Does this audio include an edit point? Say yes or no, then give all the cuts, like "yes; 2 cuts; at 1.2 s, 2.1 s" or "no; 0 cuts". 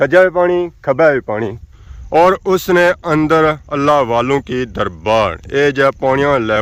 no; 0 cuts